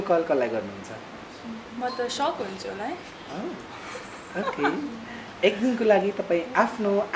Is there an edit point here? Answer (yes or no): no